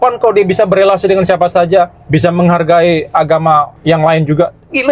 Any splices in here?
yes; 2 cuts; at 2.0 s, 3.7 s

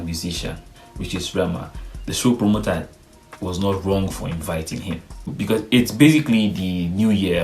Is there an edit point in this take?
yes; 1 cut; at 5.3 s

